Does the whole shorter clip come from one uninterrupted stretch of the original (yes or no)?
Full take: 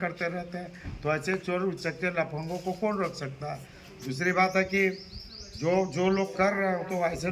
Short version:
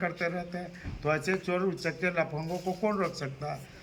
yes